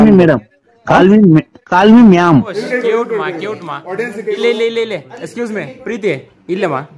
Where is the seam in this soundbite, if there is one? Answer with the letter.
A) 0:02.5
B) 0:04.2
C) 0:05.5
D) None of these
A